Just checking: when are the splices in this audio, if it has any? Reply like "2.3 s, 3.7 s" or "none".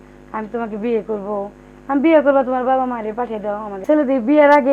3.7 s